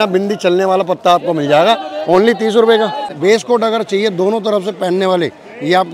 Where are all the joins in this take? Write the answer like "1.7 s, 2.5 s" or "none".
3.0 s